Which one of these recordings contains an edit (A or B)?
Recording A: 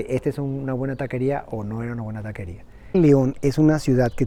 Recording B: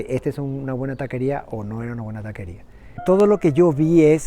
B